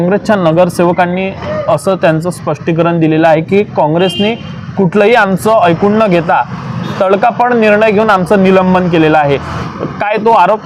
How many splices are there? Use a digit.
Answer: 0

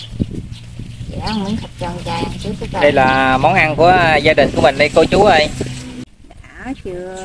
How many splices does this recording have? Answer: 1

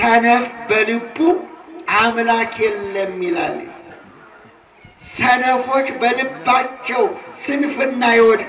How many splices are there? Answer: 0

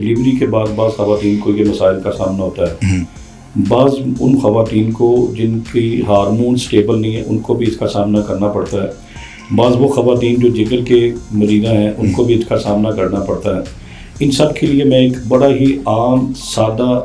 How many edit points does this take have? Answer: 0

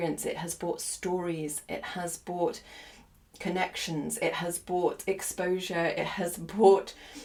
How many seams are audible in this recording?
0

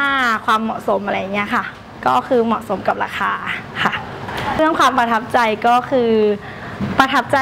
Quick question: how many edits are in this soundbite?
1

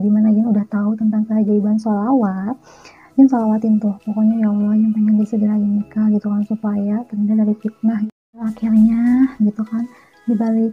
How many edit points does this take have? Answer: 1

